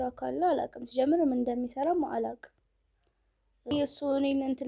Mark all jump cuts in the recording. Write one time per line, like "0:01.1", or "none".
0:03.7